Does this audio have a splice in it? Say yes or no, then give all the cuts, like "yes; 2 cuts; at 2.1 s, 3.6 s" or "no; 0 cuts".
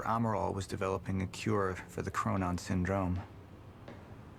no; 0 cuts